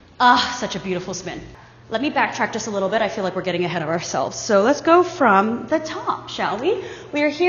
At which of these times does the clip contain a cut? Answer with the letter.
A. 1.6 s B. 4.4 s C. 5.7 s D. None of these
D